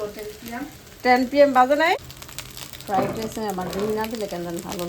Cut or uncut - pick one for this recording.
cut